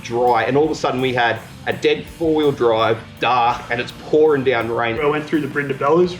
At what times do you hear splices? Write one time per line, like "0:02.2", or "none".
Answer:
0:03.1
0:05.0